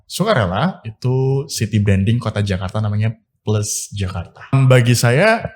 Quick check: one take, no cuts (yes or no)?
no